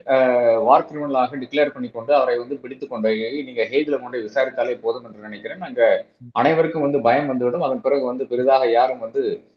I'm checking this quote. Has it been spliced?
no; 0 cuts

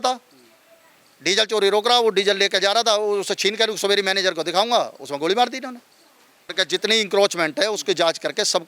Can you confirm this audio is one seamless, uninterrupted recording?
no; 1 cut; at 6.5 s

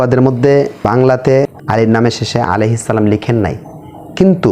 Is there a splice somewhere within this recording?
yes; 2 cuts; at 0.8 s, 1.6 s

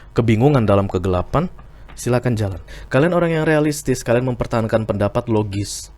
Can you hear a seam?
yes; 1 cut; at 2.7 s

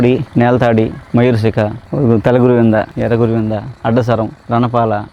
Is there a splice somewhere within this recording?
no; 0 cuts

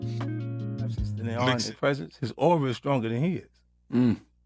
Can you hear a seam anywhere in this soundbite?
yes; 1 cut; at 1.4 s

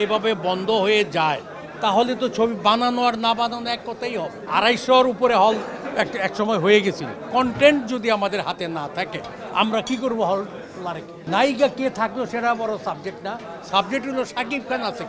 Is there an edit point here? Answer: yes; 3 cuts; at 4.4 s, 7.1 s, 11.1 s

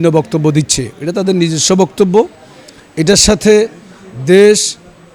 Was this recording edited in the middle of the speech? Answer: no; 0 cuts

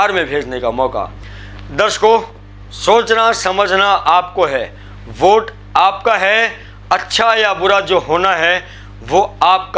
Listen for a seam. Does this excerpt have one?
yes; 1 cut; at 1.2 s

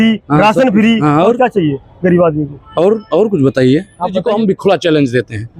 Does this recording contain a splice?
yes; 1 cut; at 4.2 s

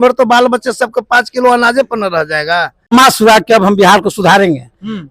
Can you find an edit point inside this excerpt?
yes; 1 cut; at 2.9 s

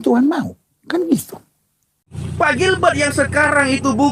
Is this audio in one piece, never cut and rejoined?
no; 1 cut; at 2.0 s

